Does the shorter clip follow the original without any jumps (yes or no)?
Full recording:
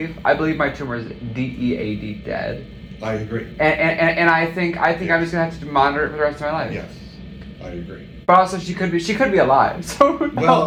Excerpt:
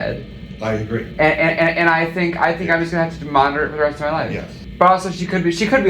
no